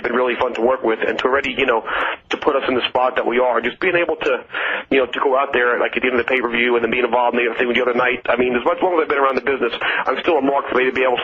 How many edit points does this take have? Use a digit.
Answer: 1